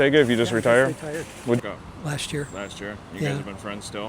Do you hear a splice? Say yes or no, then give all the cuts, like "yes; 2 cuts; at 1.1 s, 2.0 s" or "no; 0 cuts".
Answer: yes; 1 cut; at 1.6 s